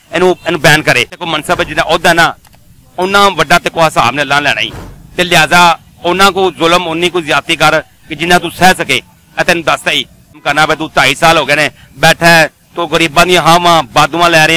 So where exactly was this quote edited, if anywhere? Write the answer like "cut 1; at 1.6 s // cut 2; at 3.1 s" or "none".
cut 1; at 1.3 s // cut 2; at 10.4 s